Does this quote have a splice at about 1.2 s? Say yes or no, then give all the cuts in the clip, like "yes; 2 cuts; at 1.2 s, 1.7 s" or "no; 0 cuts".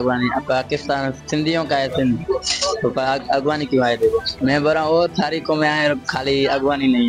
no; 1 cut; at 4.3 s